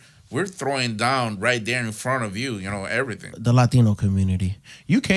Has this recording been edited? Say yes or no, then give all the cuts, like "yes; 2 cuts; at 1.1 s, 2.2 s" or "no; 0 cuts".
yes; 1 cut; at 3.3 s